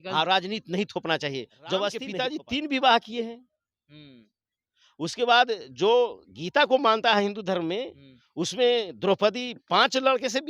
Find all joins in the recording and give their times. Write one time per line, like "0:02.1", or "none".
0:02.1